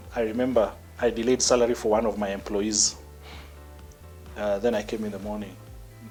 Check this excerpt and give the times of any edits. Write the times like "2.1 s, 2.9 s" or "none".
none